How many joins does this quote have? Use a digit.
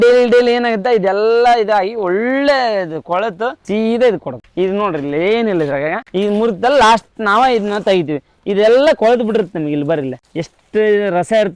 3